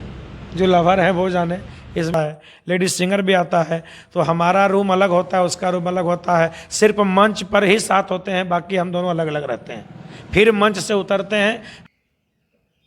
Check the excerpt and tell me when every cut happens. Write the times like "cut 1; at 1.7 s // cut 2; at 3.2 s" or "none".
cut 1; at 2.1 s // cut 2; at 11.7 s